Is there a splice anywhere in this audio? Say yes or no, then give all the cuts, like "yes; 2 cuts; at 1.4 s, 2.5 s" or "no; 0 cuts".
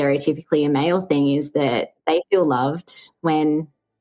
no; 0 cuts